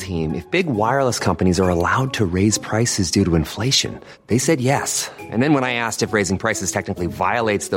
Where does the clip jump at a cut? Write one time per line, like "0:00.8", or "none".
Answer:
none